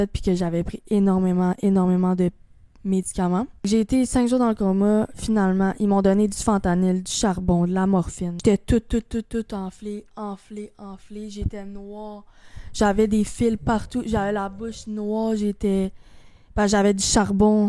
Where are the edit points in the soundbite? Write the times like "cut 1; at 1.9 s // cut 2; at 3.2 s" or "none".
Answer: cut 1; at 3.7 s // cut 2; at 8.3 s

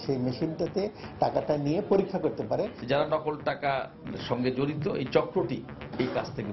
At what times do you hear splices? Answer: cut 1; at 2.8 s

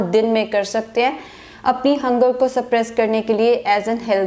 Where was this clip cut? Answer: none

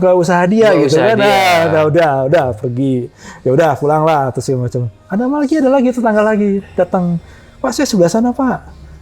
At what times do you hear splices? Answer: none

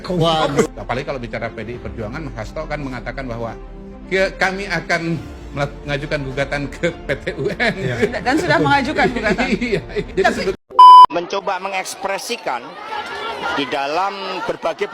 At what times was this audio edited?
cut 1; at 10.5 s // cut 2; at 11.2 s

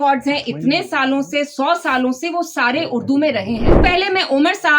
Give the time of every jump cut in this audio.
cut 1; at 3.7 s

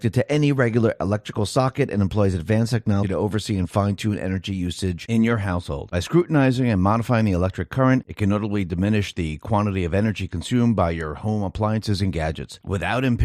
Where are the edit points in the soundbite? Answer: cut 1; at 3.1 s

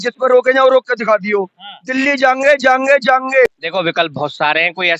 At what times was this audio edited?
cut 1; at 3.5 s

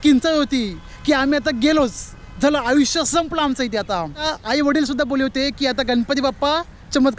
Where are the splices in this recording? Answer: cut 1; at 4.2 s

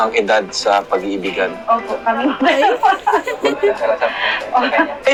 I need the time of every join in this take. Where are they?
none

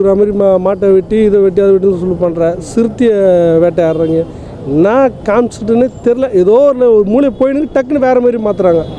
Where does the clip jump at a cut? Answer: none

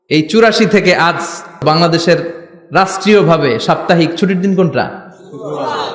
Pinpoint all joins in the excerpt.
cut 1; at 1.6 s

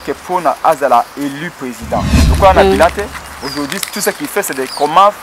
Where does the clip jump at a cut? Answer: cut 1; at 2.3 s

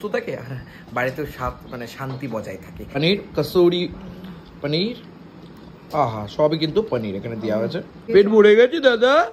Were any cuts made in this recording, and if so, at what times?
cut 1; at 2.9 s // cut 2; at 8.0 s

